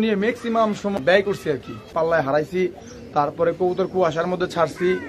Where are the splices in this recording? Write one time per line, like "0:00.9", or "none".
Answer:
0:01.0
0:01.9